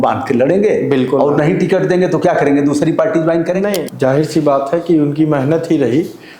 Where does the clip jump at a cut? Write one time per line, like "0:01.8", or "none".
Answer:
0:03.8